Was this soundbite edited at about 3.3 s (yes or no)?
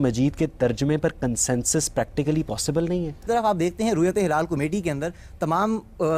yes